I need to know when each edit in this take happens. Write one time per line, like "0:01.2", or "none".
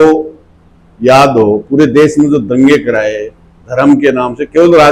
none